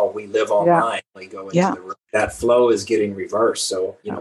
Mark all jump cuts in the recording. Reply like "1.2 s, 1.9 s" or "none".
2.0 s